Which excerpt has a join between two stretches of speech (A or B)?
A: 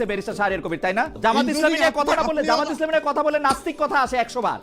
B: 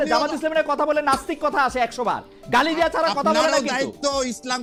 A